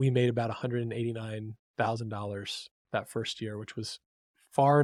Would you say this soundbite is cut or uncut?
uncut